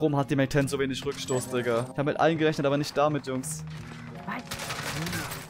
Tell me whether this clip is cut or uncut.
cut